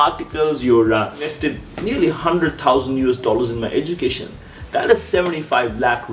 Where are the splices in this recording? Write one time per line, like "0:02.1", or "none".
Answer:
0:01.4